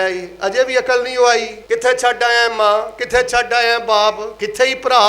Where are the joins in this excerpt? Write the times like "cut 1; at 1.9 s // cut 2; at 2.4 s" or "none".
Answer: cut 1; at 1.5 s